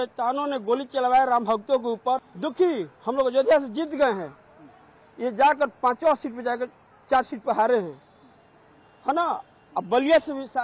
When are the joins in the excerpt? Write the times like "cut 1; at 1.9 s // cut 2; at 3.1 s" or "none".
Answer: none